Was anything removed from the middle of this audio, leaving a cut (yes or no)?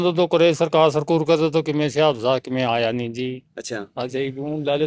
no